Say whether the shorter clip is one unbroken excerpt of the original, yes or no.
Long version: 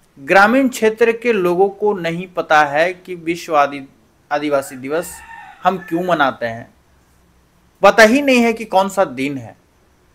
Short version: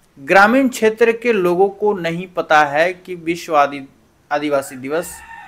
yes